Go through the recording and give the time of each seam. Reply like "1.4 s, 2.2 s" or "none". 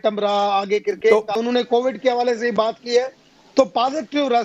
1.3 s